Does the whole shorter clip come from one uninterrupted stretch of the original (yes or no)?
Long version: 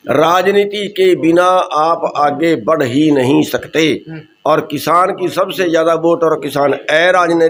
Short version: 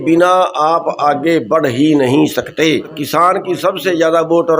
no